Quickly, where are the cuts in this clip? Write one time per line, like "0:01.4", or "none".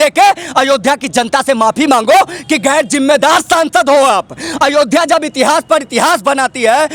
none